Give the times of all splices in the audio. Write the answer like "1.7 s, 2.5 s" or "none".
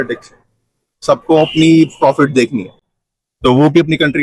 none